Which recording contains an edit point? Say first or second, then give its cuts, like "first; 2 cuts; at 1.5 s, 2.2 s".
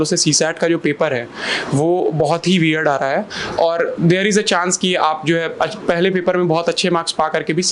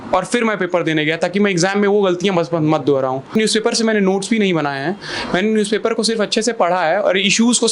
second; 1 cut; at 3.3 s